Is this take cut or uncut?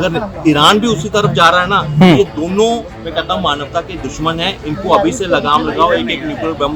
uncut